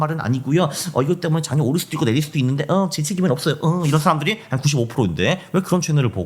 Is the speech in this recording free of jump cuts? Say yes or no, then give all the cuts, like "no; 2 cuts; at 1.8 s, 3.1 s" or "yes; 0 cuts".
yes; 0 cuts